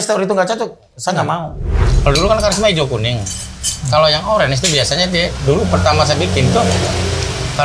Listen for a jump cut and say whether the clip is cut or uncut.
cut